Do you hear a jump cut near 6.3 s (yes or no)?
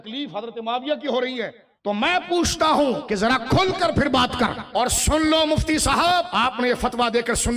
yes